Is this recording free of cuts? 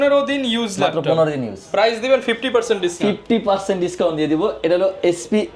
yes; 0 cuts

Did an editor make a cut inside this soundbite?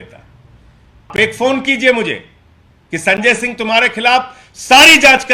yes; 1 cut; at 1.2 s

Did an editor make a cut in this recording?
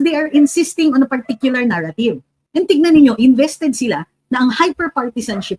yes; 1 cut; at 2.3 s

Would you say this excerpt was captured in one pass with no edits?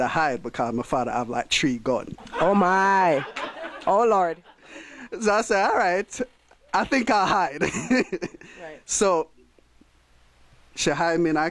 yes; 0 cuts

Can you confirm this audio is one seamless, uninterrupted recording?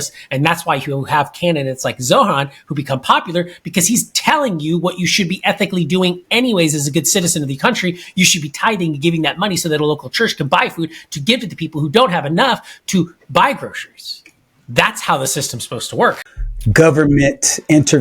no; 1 cut; at 16.3 s

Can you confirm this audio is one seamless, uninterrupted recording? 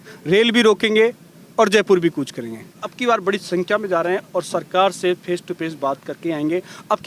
no; 1 cut; at 2.9 s

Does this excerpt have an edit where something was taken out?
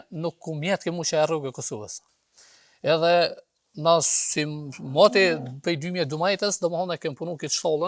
no; 0 cuts

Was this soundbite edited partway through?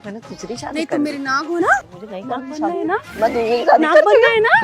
yes; 1 cut; at 1.9 s

